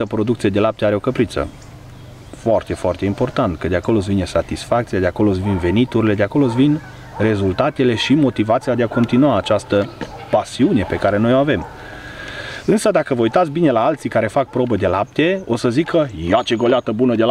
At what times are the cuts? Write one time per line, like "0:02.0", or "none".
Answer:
none